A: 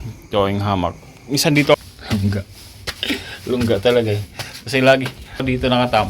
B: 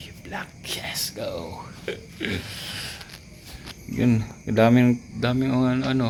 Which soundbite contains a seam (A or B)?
A